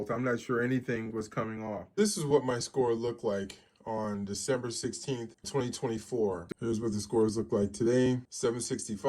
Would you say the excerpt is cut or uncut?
cut